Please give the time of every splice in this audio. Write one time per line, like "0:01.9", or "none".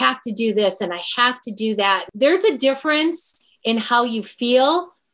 0:02.1